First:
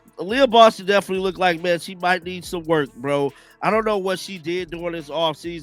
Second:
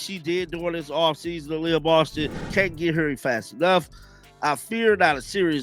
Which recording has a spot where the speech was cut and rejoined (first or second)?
second